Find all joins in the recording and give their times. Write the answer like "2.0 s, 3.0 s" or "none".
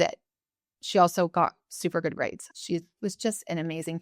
2.4 s

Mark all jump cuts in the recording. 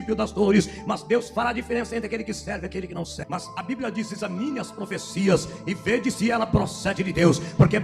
3.2 s

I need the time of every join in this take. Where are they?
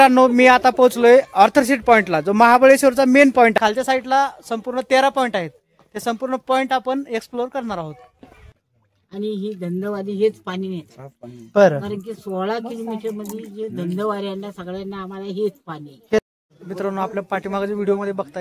3.5 s, 8.3 s, 16.3 s

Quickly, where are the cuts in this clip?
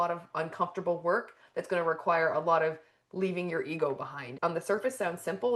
4.2 s

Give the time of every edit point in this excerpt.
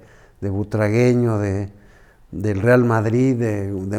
none

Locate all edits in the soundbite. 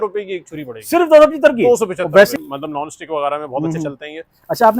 2.3 s

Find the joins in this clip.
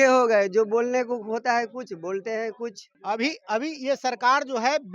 2.9 s

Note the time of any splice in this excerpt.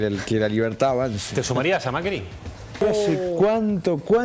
2.8 s

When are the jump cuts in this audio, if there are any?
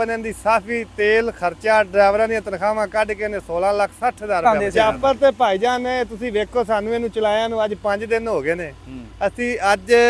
4.4 s

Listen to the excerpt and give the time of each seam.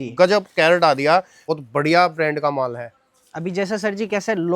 1.4 s

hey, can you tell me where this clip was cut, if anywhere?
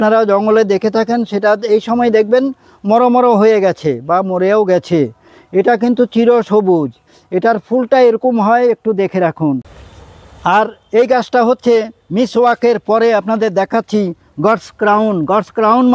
9.8 s

